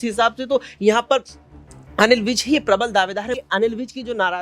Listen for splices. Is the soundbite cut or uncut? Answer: cut